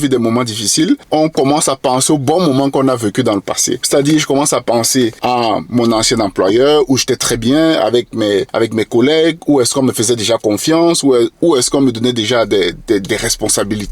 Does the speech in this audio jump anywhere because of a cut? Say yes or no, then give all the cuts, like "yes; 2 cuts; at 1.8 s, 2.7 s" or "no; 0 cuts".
yes; 4 cuts; at 1.0 s, 3.7 s, 5.2 s, 8.5 s